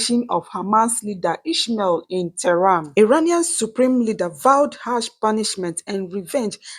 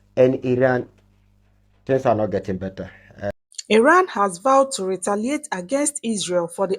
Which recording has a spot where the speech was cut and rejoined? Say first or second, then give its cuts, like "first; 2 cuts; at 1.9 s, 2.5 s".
first; 1 cut; at 2.9 s